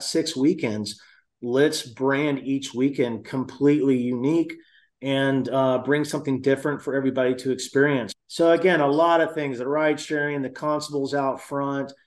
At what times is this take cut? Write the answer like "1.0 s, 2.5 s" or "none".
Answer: 8.2 s